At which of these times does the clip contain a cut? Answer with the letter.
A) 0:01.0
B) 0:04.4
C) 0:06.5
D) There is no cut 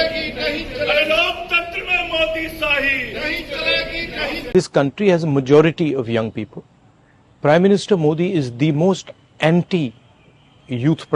B